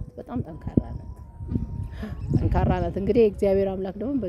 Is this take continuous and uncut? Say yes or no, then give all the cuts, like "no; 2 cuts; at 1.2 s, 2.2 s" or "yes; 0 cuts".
yes; 0 cuts